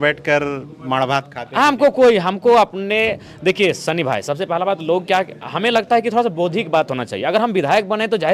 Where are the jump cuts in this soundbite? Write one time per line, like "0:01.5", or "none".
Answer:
none